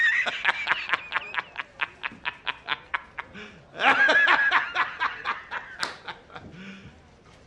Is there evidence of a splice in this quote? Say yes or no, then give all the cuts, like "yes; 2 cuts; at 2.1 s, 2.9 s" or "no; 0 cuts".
yes; 1 cut; at 3.3 s